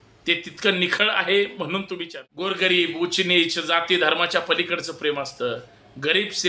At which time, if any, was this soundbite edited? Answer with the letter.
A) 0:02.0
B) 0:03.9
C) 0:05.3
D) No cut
A